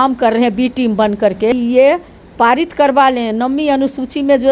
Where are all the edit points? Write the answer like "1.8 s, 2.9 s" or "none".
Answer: 1.5 s